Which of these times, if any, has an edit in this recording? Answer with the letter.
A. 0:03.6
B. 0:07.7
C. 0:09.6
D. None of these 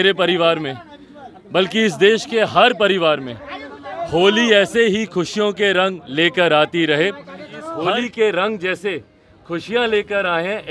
B